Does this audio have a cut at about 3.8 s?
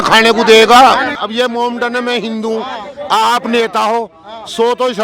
no; 1 cut; at 1.1 s

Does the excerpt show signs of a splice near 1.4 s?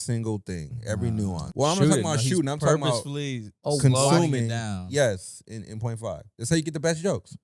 yes; 1 cut; at 1.4 s

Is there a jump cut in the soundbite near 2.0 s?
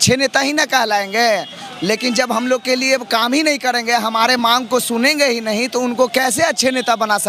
no; 0 cuts

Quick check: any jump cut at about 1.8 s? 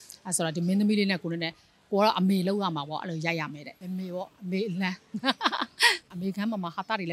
no; 2 cuts; at 3.7 s, 6.1 s

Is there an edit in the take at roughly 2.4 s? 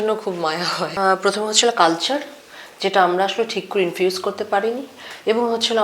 no; 1 cut; at 0.9 s

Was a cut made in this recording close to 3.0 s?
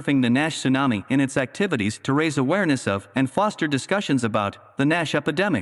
yes; 1 cut; at 3.0 s

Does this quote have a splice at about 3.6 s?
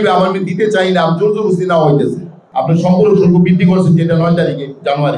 no; 1 cut; at 2.4 s

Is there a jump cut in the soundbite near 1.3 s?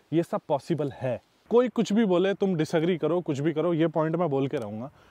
yes; 1 cut; at 1.3 s

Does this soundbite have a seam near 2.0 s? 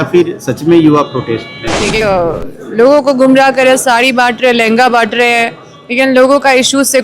yes; 1 cut; at 2.0 s

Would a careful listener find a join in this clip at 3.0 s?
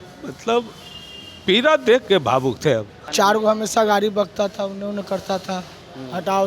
yes; 1 cut; at 3.0 s

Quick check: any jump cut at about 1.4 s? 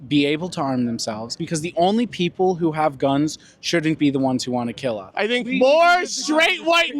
yes; 2 cuts; at 1.4 s, 5.1 s

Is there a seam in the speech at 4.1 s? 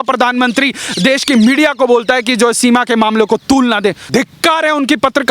yes; 1 cut; at 4.1 s

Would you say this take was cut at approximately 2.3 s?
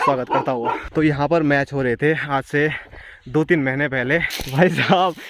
no; 2 cuts; at 0.8 s, 4.4 s

